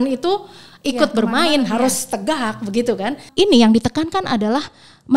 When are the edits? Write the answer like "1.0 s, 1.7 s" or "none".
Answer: 3.3 s